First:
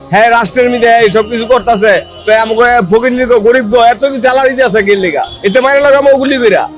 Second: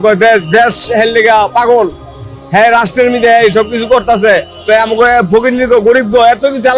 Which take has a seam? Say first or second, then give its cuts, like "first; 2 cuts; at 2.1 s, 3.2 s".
first; 1 cut; at 5.3 s